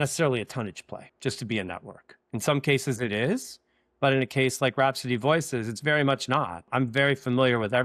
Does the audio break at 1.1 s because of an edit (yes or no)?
yes